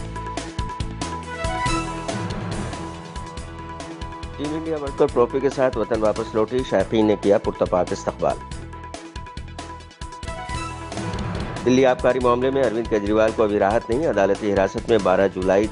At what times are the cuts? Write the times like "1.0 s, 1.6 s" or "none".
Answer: 0.9 s